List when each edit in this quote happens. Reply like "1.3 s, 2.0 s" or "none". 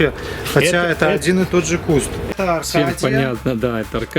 2.2 s